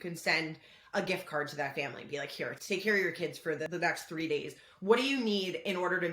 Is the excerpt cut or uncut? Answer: cut